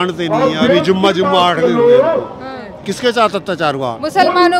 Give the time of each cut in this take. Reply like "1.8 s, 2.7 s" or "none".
2.6 s